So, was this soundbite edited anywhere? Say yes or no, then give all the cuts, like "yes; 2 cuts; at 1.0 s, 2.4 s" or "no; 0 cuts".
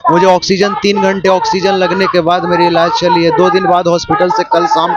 no; 0 cuts